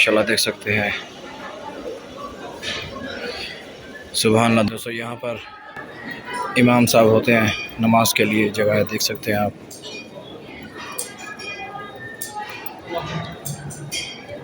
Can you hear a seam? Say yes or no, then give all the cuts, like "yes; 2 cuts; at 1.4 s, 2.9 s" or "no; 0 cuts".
yes; 1 cut; at 4.7 s